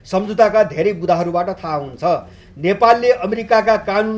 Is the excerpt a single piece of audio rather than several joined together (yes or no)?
yes